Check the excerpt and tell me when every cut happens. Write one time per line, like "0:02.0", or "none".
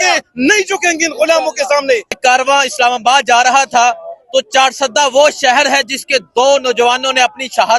0:02.2